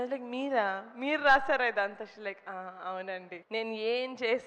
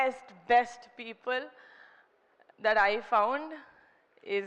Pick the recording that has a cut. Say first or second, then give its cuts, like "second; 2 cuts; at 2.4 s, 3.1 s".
first; 1 cut; at 3.3 s